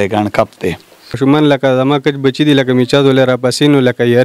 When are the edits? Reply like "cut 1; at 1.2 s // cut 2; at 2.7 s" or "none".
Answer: cut 1; at 1.1 s